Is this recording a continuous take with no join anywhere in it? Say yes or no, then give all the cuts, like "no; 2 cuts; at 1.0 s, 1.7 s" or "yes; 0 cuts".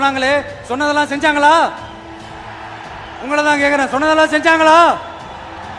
yes; 0 cuts